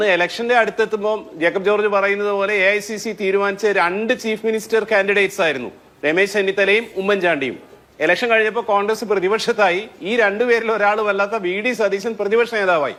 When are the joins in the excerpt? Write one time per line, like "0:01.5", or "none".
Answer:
none